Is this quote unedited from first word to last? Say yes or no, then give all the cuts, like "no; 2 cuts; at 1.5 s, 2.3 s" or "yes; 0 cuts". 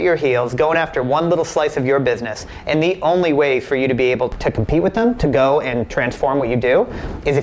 yes; 0 cuts